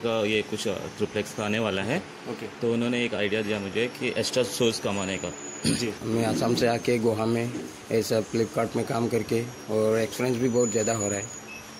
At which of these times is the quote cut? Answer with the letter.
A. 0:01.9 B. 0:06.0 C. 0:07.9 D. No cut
B